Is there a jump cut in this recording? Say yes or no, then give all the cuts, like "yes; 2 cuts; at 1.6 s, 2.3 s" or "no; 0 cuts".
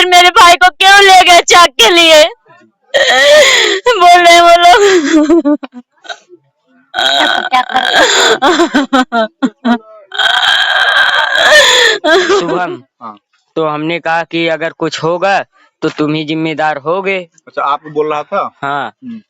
yes; 1 cut; at 12.5 s